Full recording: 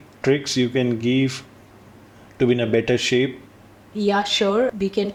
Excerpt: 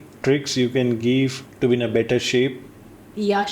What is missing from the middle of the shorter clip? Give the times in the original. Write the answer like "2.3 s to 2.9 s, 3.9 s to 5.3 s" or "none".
1.4 s to 2.2 s

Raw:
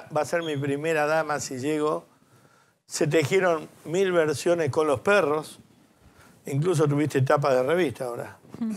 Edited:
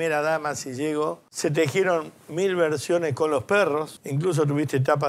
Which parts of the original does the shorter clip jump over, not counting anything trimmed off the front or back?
2.1 s to 2.8 s, 5.6 s to 6.4 s

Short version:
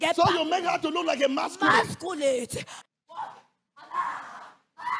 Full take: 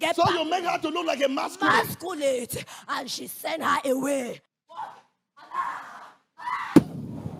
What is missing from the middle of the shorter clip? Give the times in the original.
2.8 s to 4.4 s

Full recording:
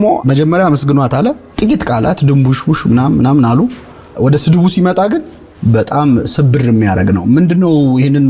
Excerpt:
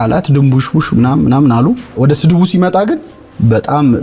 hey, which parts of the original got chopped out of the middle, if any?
3.8 s to 4.1 s

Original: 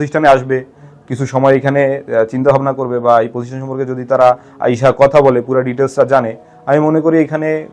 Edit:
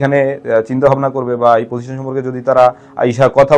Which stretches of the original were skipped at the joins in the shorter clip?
none

